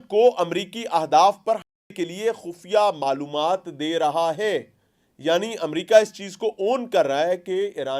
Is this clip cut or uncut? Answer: uncut